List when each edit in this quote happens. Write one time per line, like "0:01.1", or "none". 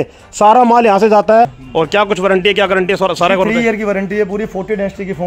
0:01.5